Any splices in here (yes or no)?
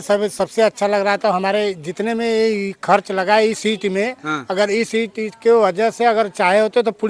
no